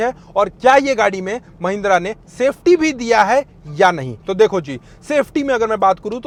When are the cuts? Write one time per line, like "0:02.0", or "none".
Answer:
none

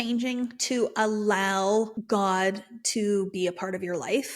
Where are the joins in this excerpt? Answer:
0:02.0

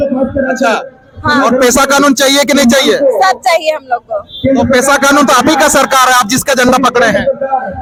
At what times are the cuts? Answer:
none

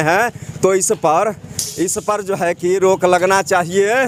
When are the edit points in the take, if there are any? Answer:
none

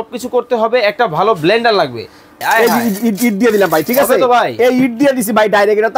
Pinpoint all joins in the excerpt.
0:02.4

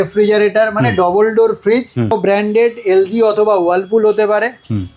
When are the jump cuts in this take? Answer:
0:02.1

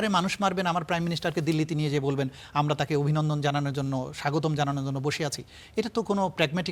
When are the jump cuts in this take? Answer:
none

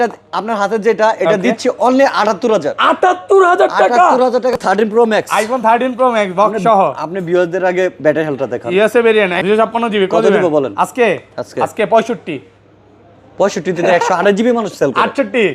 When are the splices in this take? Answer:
0:04.5
0:09.4

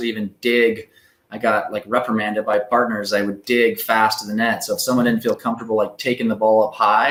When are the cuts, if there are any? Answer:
none

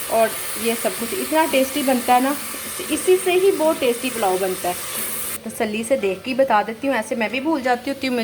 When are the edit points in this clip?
0:05.4

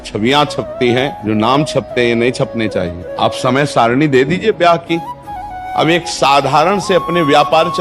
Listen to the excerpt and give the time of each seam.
0:01.2
0:03.0
0:05.5

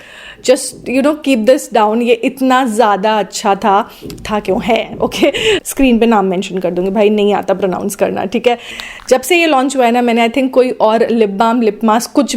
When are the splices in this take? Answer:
0:05.6
0:08.8

